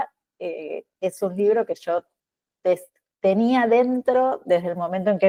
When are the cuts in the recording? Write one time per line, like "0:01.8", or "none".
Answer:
none